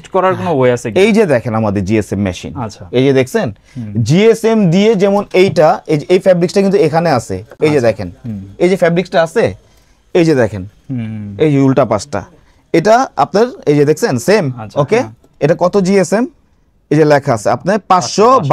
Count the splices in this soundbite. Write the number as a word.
zero